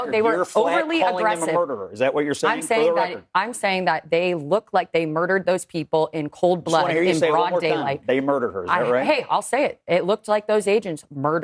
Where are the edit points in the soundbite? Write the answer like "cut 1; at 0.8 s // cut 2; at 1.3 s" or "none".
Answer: none